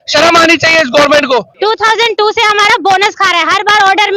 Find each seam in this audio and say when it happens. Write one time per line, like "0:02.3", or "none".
0:01.5